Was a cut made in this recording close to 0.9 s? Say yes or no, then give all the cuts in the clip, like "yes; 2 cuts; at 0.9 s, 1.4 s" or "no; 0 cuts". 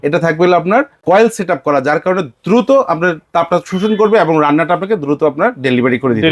yes; 1 cut; at 0.9 s